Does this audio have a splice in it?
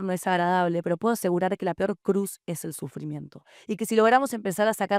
no; 0 cuts

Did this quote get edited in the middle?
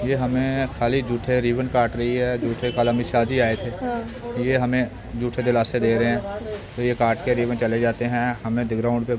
no; 0 cuts

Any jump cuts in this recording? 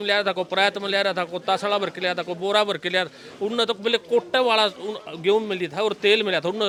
no; 0 cuts

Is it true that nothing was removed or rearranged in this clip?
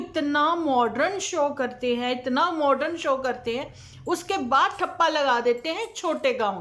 yes; 0 cuts

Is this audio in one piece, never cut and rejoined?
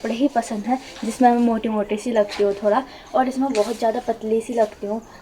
yes; 0 cuts

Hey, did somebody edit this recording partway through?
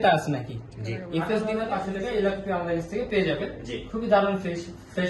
yes; 1 cut; at 1.5 s

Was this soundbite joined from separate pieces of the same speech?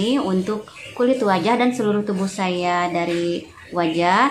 no; 0 cuts

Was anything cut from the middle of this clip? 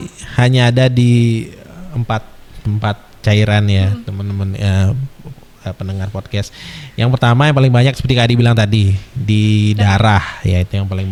no; 0 cuts

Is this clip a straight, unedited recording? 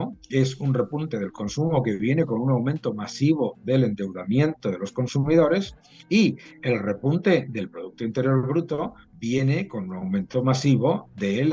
yes; 0 cuts

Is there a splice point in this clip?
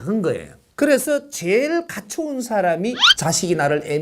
yes; 1 cut; at 3.1 s

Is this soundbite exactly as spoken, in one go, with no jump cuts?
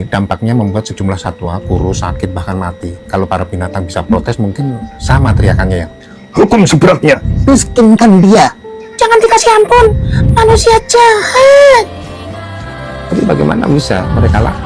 yes; 0 cuts

